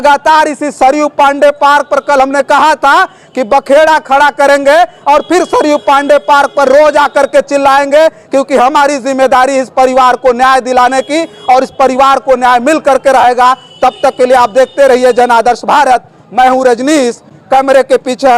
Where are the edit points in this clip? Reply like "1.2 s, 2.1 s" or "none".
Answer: none